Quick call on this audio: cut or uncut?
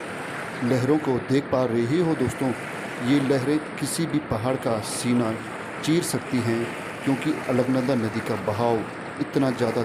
uncut